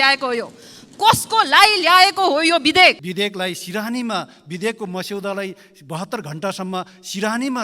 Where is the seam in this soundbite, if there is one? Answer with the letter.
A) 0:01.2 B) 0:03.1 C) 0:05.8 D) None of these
B